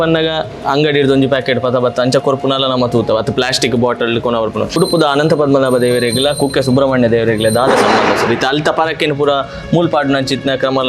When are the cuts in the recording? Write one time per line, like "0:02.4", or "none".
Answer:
0:04.8

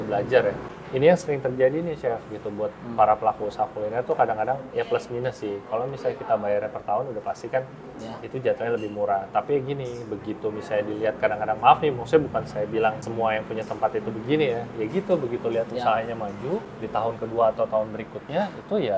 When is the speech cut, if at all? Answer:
0:13.0
0:16.7

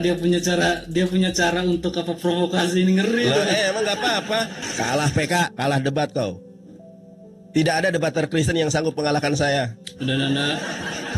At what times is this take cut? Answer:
0:04.6

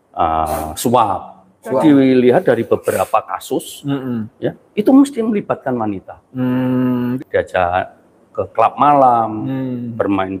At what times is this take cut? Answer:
0:01.8
0:07.1

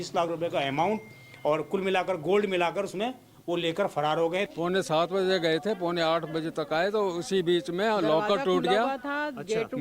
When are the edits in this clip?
0:04.5

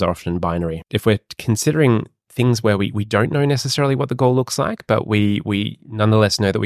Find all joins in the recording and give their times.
0:00.9

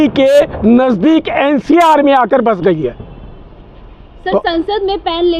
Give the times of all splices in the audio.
none

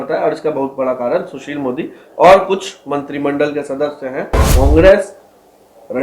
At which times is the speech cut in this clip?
0:04.4

